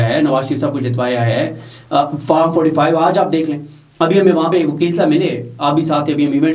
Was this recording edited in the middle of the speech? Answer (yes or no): no